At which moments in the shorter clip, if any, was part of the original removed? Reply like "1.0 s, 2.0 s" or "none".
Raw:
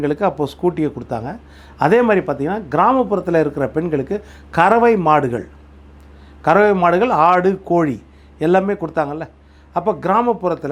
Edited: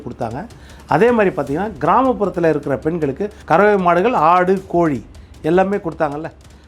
3.3 s